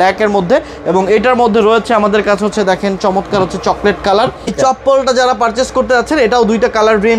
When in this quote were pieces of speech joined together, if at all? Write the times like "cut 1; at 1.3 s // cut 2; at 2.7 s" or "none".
cut 1; at 4.7 s